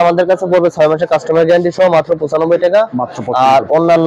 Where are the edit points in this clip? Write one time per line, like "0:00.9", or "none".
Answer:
none

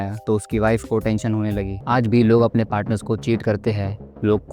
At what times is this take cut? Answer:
0:01.7

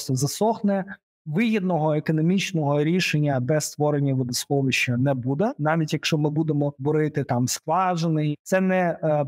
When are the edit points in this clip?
0:05.6
0:06.8
0:08.3

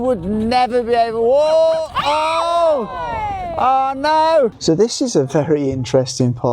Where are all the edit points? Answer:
0:04.6

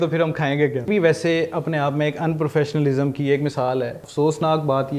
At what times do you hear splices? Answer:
0:00.9
0:04.0

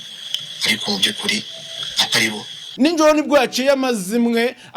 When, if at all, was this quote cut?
0:02.6

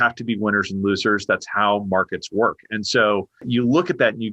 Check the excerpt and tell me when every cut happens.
0:03.4

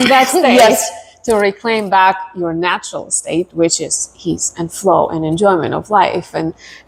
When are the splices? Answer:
none

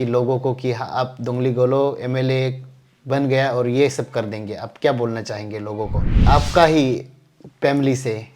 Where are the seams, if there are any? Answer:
0:06.2

